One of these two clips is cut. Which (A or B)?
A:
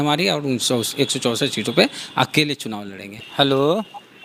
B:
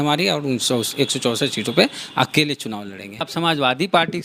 B